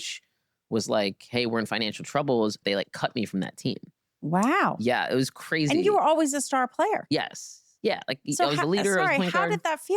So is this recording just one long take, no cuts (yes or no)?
no